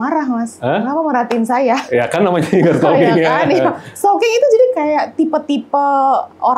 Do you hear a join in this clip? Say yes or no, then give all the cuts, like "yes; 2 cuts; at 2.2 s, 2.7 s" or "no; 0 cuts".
no; 0 cuts